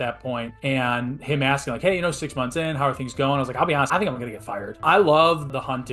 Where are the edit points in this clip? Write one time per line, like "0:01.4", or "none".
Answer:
0:04.6